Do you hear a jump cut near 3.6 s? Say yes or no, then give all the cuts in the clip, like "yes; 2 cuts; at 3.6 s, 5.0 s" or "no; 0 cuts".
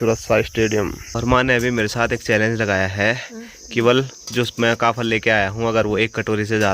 no; 1 cut; at 1.2 s